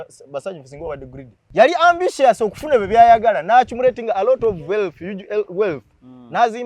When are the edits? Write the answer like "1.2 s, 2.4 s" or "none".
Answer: 1.4 s